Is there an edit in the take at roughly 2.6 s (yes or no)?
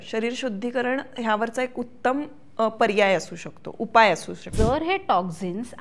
no